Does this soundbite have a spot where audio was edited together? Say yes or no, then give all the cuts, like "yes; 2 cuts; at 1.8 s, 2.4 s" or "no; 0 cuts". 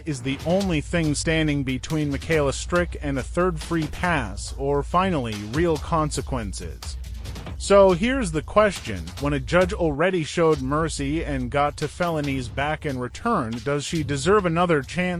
no; 0 cuts